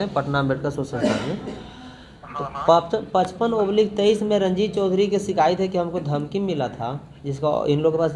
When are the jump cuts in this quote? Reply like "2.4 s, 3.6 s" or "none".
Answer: none